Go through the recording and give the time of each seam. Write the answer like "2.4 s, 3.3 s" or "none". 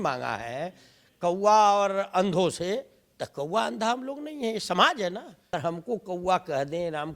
5.5 s